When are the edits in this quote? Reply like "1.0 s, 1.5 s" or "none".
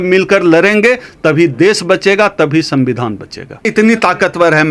3.6 s